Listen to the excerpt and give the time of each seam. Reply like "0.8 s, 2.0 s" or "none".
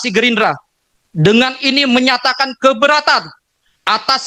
none